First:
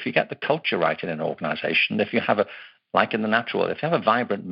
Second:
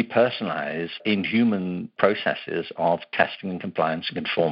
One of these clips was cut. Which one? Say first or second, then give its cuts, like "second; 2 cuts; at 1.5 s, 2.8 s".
second; 2 cuts; at 1.0 s, 1.9 s